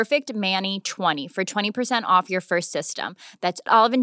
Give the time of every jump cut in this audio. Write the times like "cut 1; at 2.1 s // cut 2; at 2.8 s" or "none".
cut 1; at 1.2 s